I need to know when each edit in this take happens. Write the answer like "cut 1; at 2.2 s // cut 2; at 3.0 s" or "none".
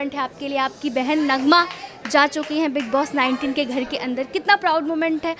none